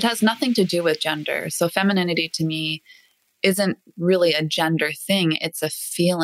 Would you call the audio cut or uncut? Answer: uncut